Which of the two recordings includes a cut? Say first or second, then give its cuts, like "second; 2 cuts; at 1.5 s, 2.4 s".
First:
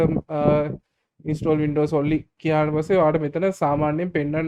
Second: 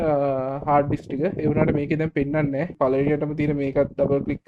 second; 1 cut; at 2.7 s